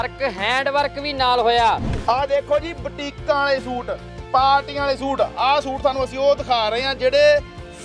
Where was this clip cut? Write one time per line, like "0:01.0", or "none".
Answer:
0:01.9